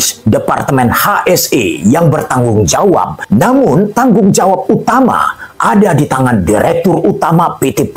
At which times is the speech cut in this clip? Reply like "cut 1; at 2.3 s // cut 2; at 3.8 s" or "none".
cut 1; at 3.3 s